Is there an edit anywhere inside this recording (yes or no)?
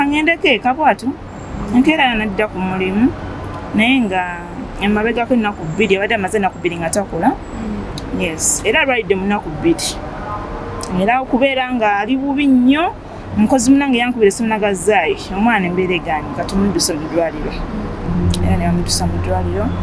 no